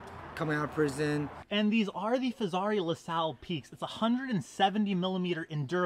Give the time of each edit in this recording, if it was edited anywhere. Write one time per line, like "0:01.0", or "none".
0:01.4